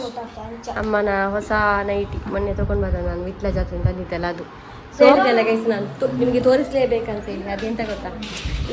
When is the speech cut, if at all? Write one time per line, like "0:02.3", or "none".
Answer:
0:05.2